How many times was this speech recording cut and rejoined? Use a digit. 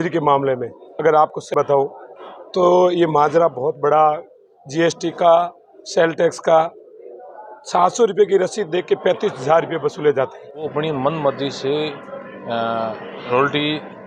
2